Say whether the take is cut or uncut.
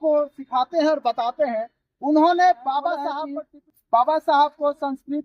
cut